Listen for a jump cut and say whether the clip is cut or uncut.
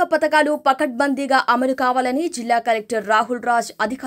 uncut